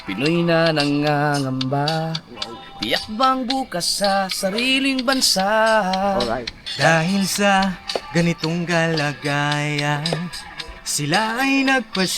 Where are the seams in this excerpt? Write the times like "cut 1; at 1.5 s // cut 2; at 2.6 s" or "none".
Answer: none